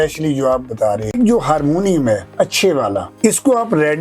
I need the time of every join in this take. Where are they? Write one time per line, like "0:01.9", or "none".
0:01.1